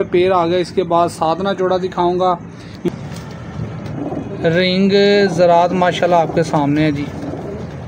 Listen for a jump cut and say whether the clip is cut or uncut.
cut